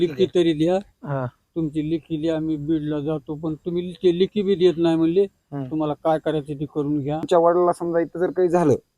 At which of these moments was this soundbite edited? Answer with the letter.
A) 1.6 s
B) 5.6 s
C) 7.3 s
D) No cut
C